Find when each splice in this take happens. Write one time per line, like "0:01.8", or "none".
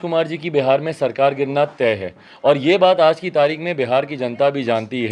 none